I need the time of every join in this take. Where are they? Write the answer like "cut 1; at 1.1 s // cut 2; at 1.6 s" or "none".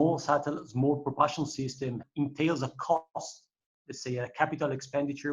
cut 1; at 2.0 s